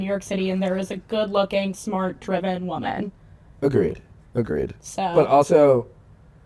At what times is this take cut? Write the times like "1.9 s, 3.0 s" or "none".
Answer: none